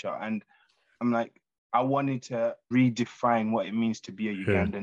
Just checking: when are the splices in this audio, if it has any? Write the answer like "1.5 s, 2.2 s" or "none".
2.6 s